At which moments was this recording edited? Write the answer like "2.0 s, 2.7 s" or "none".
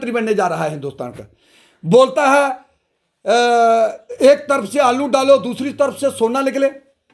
none